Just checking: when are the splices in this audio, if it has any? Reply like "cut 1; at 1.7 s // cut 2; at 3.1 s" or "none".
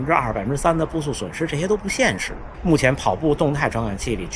cut 1; at 2.4 s